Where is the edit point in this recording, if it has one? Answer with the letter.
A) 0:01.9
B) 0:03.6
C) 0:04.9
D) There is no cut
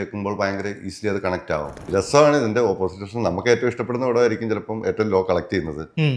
A